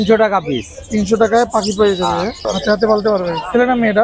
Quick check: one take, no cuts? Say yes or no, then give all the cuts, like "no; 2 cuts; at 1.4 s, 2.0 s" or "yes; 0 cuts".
no; 1 cut; at 2.5 s